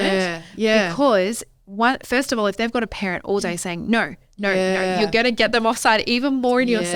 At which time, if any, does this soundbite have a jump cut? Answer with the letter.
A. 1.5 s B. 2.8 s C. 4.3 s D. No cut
D